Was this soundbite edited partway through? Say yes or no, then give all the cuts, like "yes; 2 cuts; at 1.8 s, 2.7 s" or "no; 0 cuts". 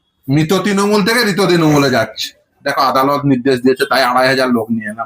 yes; 1 cut; at 2.6 s